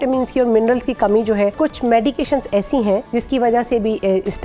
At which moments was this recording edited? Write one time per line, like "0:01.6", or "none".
0:01.6
0:03.1